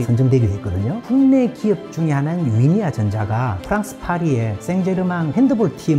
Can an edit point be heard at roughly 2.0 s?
no; 0 cuts

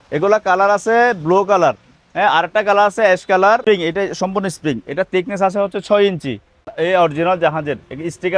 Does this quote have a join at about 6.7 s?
yes; 2 cuts; at 3.6 s, 6.7 s

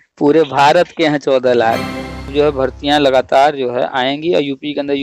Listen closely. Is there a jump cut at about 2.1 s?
yes; 1 cut; at 2.1 s

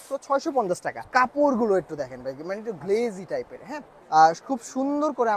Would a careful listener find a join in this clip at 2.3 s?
no; 2 cuts; at 0.9 s, 3.9 s

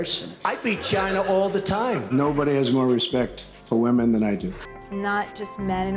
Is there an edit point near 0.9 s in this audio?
no; 1 cut; at 4.6 s

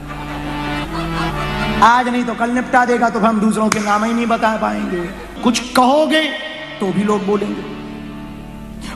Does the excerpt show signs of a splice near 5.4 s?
yes; 1 cut; at 5.4 s

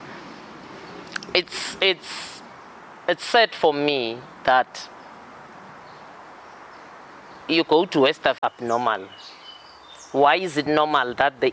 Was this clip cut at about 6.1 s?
no; 1 cut; at 8.4 s

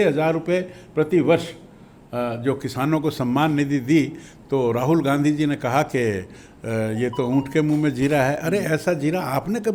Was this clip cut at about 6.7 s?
no; 0 cuts

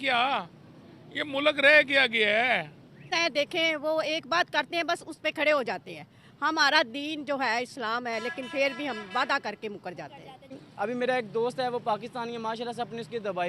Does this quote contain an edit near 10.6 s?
yes; 2 cuts; at 3.1 s, 10.6 s

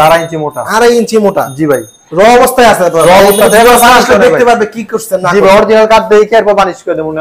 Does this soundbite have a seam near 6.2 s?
no; 1 cut; at 2.0 s

